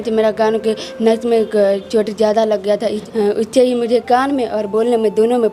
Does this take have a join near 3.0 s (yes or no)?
yes